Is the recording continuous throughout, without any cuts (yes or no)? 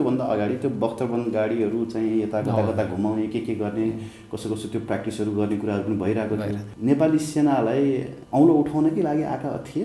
no